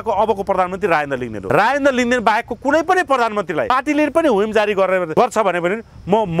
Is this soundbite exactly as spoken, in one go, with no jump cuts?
no; 3 cuts; at 1.3 s, 3.7 s, 5.1 s

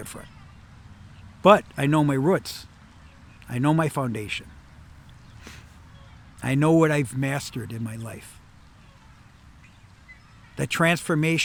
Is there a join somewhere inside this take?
no; 0 cuts

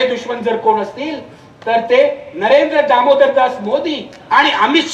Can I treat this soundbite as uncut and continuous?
yes; 0 cuts

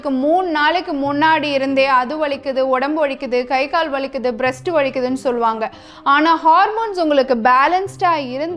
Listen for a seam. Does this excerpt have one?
no; 0 cuts

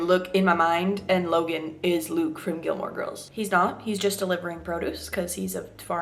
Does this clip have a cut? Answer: yes; 1 cut; at 3.2 s

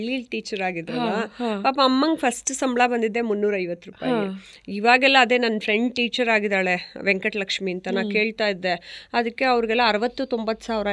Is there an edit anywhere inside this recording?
no; 0 cuts

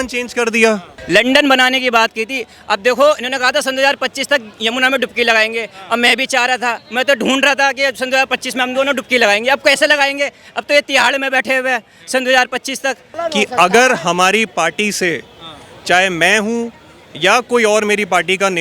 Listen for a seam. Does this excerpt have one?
yes; 2 cuts; at 0.9 s, 13.1 s

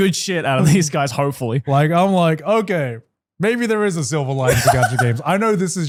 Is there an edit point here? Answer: no; 0 cuts

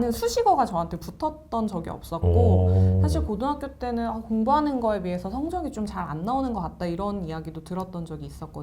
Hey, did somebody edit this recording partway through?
no; 0 cuts

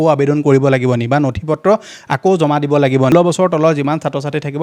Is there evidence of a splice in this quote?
yes; 1 cut; at 3.1 s

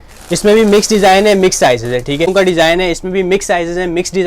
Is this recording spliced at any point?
yes; 1 cut; at 2.3 s

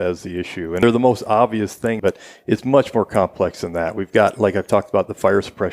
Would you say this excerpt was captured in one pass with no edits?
no; 2 cuts; at 0.8 s, 2.0 s

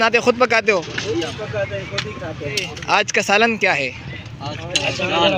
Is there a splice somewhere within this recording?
yes; 1 cut; at 2.7 s

